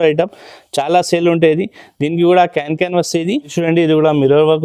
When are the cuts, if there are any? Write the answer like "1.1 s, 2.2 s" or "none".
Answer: 3.5 s